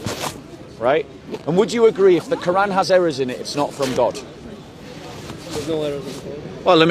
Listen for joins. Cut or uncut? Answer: uncut